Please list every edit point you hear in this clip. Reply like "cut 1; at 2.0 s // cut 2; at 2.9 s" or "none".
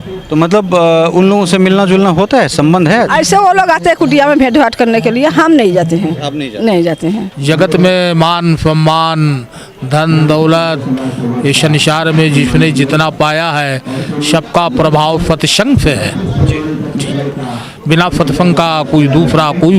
cut 1; at 7.3 s